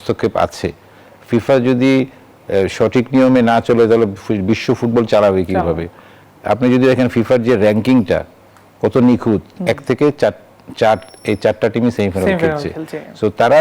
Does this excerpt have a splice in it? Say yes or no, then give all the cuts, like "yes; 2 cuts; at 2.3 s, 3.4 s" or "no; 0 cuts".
no; 0 cuts